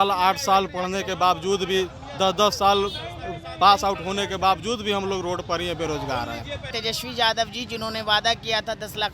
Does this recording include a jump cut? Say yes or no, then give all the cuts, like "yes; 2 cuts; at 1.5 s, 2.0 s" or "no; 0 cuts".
yes; 1 cut; at 6.7 s